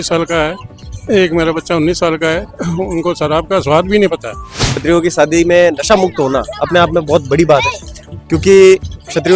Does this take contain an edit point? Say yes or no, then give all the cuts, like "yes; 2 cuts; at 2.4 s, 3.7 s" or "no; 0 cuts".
yes; 1 cut; at 4.7 s